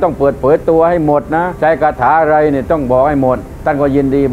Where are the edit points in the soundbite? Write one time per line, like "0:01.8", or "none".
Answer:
0:01.5